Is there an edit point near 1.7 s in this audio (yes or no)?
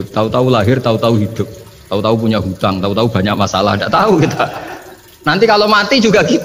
no